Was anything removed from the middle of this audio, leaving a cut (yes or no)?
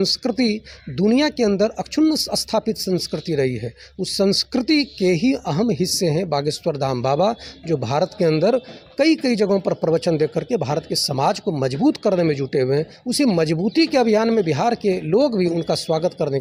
no